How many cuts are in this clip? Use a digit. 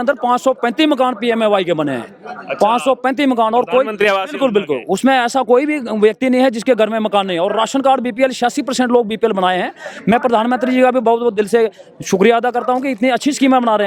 0